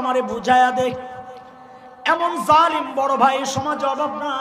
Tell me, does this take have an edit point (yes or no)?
no